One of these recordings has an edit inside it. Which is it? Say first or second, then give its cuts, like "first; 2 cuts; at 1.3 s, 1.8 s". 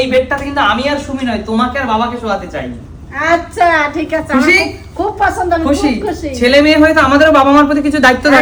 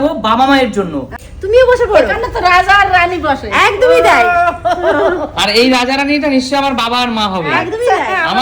second; 1 cut; at 1.2 s